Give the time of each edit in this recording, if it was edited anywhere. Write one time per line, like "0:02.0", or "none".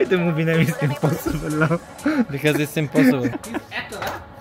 0:03.3